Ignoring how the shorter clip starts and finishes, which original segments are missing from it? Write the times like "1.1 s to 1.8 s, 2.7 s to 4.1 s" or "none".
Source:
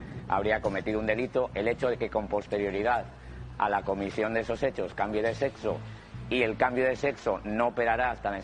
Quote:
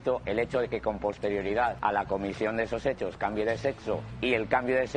3.1 s to 3.5 s, 5.9 s to 6.2 s